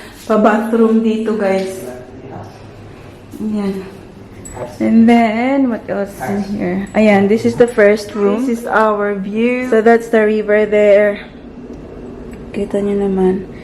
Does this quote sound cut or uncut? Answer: cut